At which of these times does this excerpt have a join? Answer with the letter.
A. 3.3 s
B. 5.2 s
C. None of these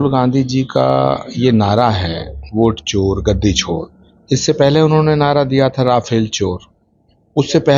C